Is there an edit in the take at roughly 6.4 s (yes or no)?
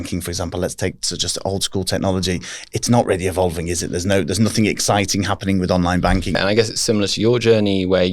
yes